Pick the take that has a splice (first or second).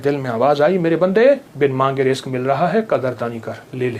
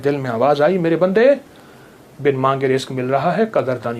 first